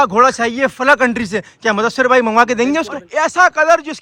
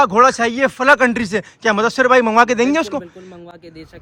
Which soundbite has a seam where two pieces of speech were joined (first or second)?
first